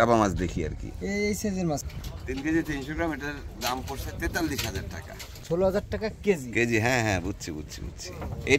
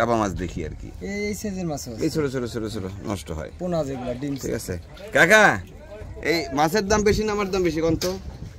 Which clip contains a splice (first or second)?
first